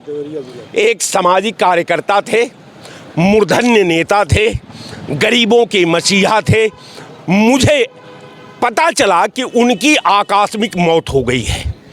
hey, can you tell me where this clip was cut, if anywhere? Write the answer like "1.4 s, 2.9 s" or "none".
none